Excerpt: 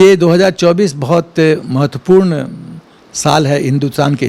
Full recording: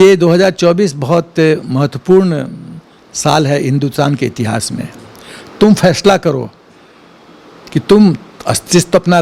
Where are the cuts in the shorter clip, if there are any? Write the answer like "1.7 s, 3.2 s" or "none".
none